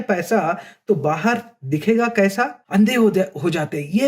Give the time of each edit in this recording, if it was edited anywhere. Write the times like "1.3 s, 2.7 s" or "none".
2.6 s